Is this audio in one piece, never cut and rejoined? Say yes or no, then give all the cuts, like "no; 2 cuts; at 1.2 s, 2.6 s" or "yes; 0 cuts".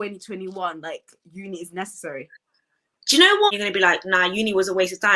no; 1 cut; at 3.5 s